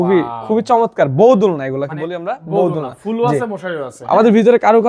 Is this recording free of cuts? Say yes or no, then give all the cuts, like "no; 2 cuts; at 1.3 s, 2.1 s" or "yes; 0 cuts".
yes; 0 cuts